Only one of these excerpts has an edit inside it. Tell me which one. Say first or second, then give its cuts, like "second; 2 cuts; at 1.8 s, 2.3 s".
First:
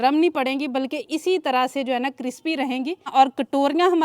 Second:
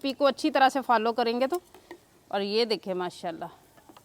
first; 1 cut; at 3.1 s